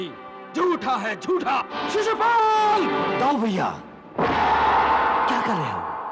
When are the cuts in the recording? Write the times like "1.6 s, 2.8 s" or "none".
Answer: 1.7 s

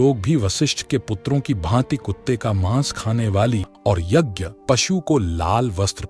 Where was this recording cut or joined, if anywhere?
3.7 s

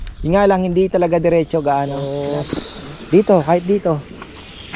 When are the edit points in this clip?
2.1 s

